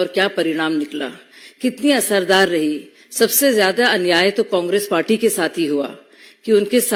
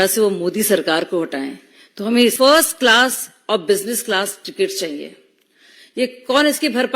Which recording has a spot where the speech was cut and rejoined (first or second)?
second